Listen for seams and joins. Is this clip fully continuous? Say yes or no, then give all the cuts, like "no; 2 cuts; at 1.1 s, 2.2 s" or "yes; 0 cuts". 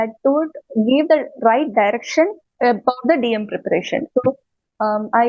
no; 1 cut; at 2.4 s